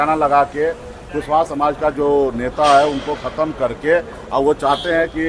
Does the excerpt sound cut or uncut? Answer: uncut